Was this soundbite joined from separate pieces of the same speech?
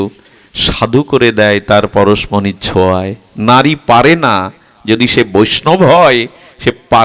no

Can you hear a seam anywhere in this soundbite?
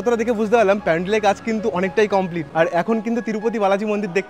yes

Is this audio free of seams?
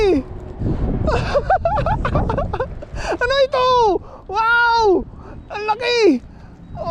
yes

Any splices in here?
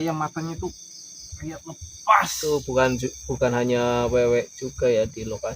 yes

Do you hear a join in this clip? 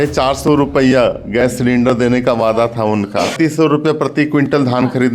yes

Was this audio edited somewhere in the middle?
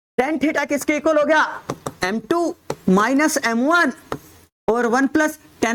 no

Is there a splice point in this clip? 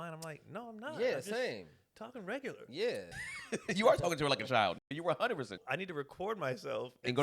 yes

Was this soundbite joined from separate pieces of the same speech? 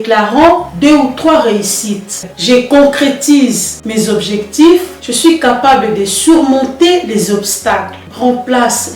yes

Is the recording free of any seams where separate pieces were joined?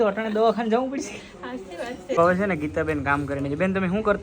no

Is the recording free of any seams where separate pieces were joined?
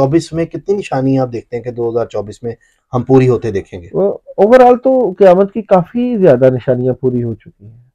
yes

